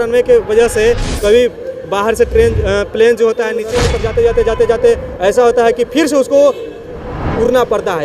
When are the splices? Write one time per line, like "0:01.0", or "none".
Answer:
0:03.7